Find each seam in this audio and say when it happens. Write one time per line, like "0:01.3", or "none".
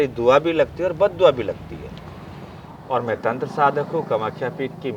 0:02.7